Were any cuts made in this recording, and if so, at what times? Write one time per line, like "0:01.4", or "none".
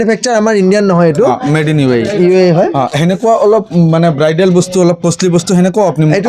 none